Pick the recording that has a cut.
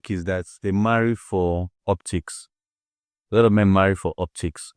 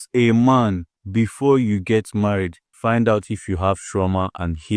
second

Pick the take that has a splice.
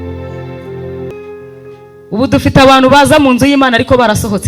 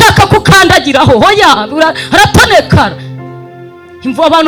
first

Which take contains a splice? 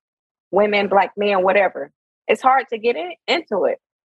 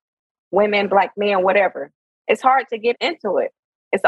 second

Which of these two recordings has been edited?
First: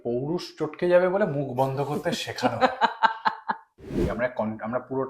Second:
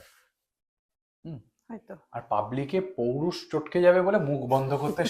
first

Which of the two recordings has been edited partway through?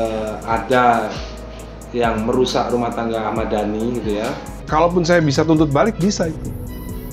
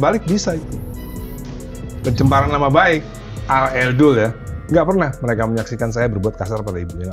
first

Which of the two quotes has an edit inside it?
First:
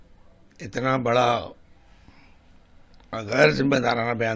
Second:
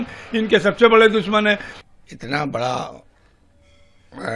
second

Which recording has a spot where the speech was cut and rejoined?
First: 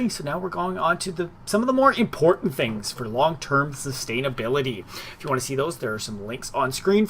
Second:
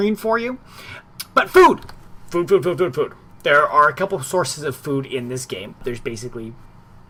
first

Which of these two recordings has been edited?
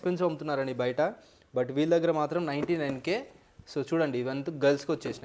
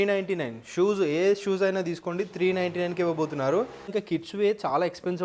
second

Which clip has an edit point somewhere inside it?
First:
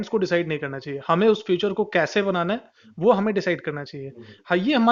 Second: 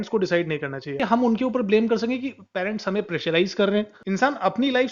second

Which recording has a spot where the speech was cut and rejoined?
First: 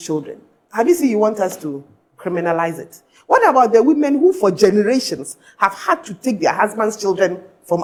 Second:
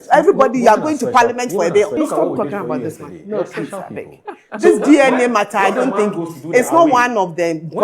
second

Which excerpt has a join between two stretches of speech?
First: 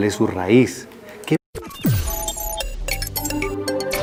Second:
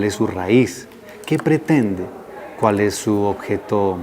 second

